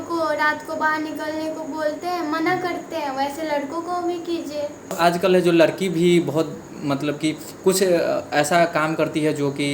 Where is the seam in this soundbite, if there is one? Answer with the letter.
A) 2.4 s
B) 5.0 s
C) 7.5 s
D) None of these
B